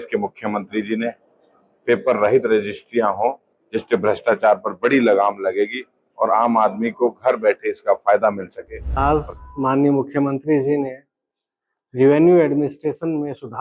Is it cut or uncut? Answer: cut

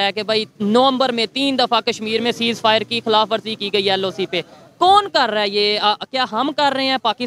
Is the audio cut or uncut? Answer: uncut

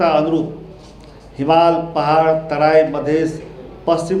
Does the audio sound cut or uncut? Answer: uncut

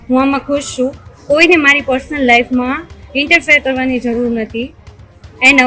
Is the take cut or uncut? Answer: uncut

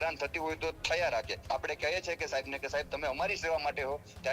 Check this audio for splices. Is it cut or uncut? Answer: cut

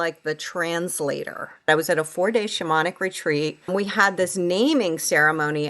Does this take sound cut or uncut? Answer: cut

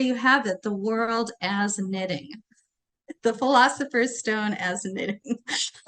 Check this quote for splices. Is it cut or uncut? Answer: uncut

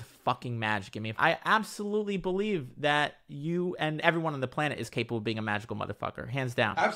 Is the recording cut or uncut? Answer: cut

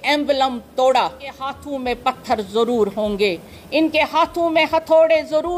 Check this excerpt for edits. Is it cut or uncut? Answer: cut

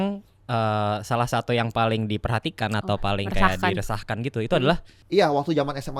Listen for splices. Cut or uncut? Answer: cut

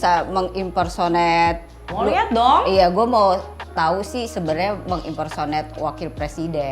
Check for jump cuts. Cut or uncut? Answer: cut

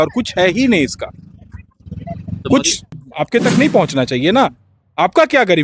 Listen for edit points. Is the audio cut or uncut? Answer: cut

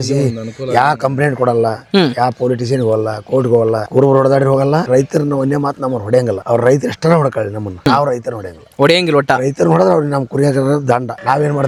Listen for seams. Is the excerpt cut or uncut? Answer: uncut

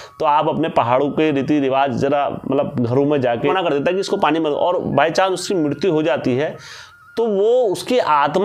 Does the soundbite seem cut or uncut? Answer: cut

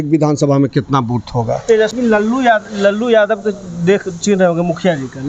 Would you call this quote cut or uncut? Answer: cut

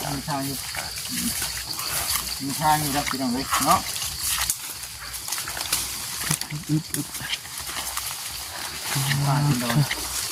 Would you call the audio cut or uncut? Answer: uncut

